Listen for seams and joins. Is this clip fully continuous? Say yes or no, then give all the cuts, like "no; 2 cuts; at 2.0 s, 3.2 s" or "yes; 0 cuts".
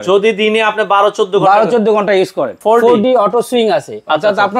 no; 1 cut; at 2.5 s